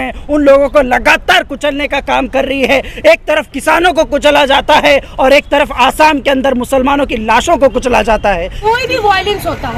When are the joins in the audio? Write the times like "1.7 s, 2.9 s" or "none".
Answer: 8.5 s